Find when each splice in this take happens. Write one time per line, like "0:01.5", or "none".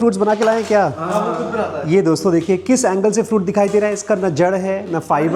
none